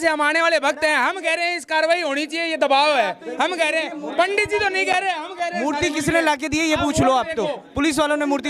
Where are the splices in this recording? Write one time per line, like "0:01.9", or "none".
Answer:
none